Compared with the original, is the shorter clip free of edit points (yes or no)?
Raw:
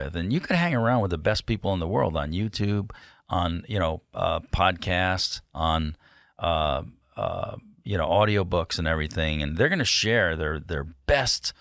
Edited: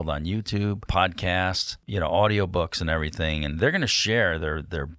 no